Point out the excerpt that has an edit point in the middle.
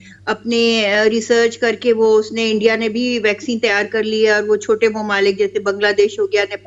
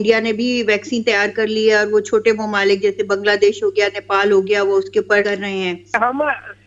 second; 1 cut; at 5.7 s

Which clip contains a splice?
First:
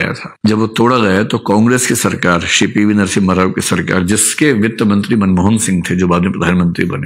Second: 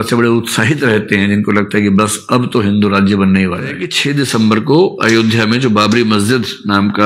second; 1 cut; at 3.8 s

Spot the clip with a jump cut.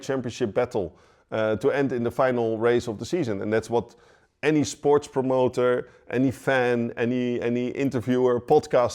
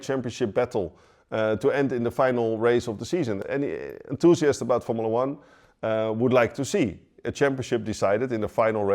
second; 1 cut; at 3.4 s

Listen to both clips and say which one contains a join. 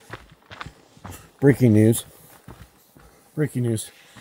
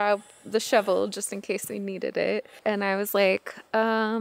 second; 1 cut; at 2.6 s

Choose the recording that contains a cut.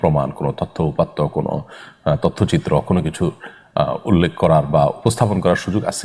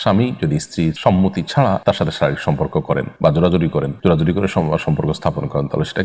second; 4 cuts; at 1.0 s, 1.8 s, 3.1 s, 3.9 s

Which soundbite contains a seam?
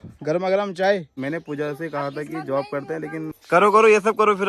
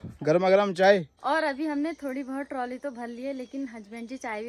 first; 2 cuts; at 1.1 s, 3.4 s

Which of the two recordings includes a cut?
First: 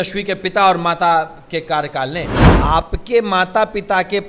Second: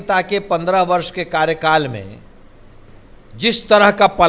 first; 1 cut; at 2.4 s

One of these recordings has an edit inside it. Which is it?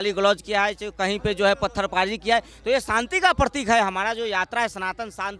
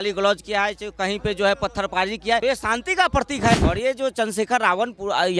second; 2 cuts; at 2.4 s, 3.5 s

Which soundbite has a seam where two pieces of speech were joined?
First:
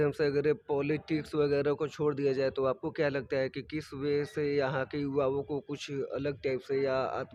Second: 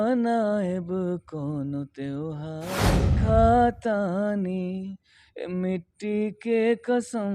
second; 1 cut; at 3.0 s

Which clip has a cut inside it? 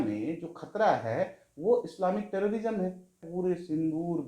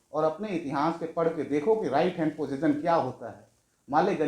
first; 1 cut; at 3.3 s

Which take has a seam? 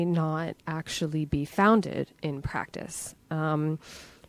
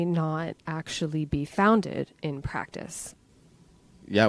second; 1 cut; at 3.2 s

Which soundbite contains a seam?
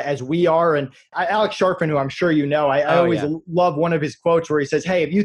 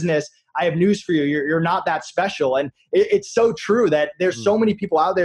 first; 1 cut; at 1.1 s

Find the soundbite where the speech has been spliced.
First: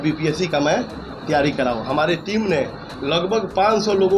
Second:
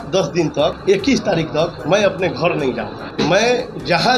second; 2 cuts; at 0.8 s, 3.0 s

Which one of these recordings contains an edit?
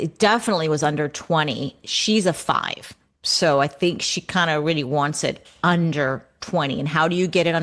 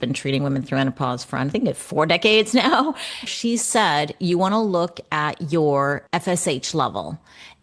second; 2 cuts; at 3.3 s, 6.0 s

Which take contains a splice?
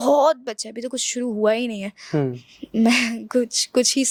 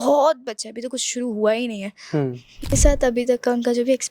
second; 1 cut; at 2.7 s

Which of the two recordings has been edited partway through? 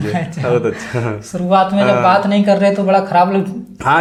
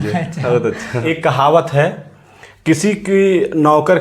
second; 1 cut; at 1.0 s

